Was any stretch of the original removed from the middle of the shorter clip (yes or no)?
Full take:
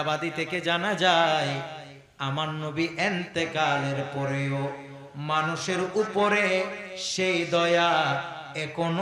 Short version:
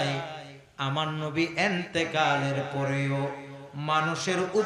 no